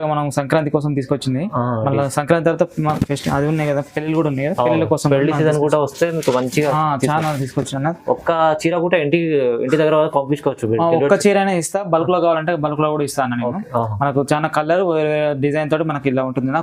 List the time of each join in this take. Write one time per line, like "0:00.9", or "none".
none